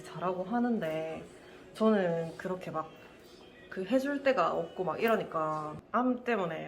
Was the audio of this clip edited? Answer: yes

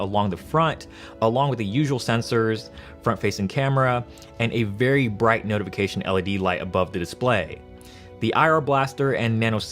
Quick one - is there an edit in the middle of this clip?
yes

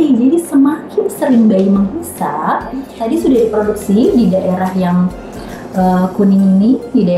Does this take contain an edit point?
yes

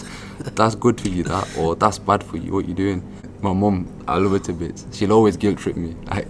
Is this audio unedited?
no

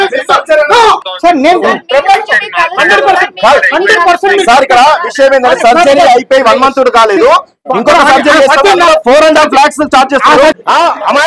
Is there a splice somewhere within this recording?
yes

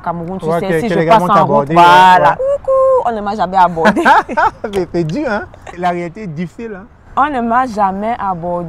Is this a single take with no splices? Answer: yes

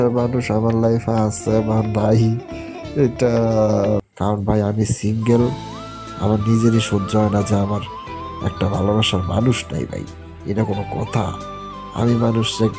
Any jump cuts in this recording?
yes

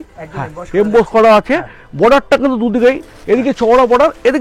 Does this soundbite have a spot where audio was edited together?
no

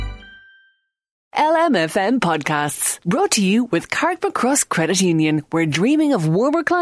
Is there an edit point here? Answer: yes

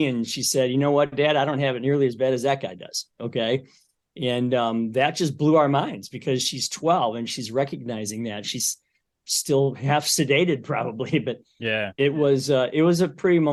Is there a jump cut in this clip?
no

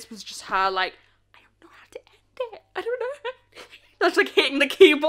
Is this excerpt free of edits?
yes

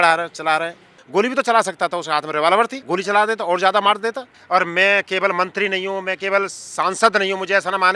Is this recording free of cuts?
no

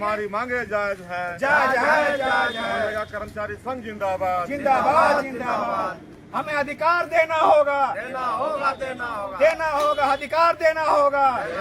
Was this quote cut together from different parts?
no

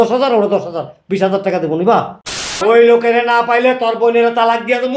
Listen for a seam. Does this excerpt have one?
yes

